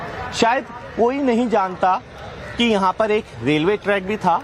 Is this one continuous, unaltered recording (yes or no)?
no